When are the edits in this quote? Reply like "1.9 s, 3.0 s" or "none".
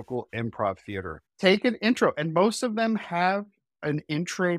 1.2 s